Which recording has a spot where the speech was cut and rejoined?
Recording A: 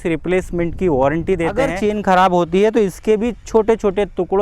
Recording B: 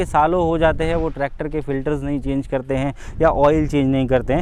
A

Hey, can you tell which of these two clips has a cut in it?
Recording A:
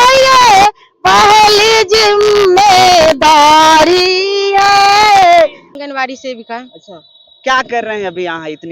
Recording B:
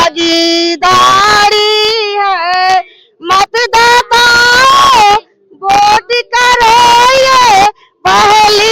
A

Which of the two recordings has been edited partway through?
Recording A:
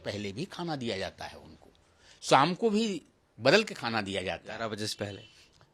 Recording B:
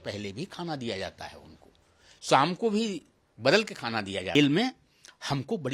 B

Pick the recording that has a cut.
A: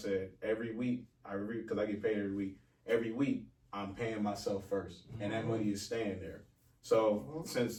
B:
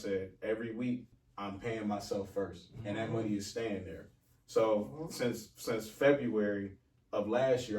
B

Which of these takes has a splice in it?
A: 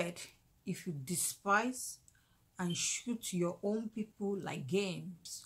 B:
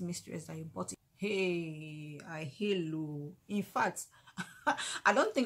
B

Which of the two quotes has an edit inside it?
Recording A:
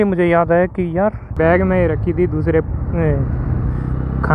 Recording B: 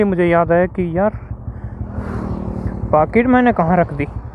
A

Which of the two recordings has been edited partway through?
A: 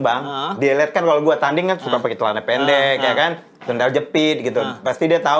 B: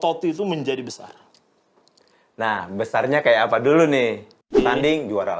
B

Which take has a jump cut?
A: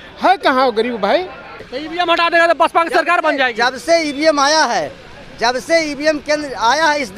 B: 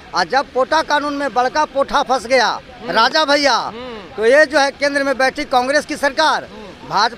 A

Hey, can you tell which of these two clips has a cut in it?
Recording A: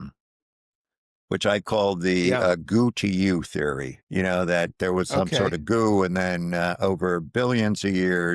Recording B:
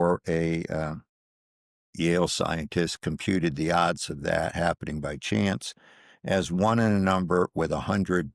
A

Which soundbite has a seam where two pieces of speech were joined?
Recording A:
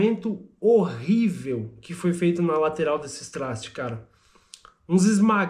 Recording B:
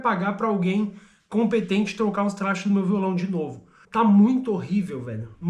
B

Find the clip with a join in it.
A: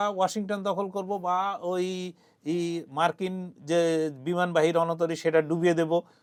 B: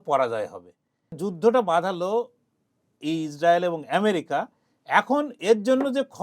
B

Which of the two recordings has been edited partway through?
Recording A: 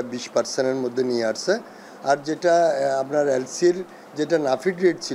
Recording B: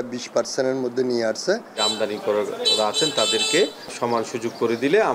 B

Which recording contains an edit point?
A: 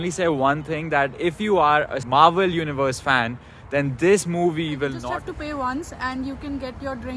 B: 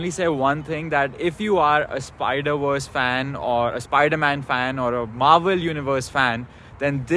A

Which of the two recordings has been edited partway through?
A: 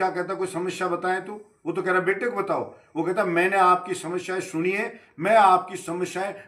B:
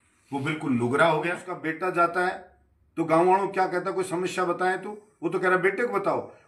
B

